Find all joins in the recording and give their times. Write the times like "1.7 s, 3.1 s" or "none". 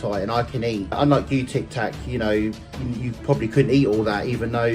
1.0 s